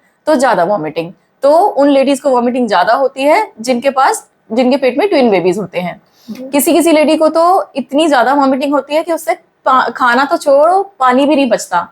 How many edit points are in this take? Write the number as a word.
zero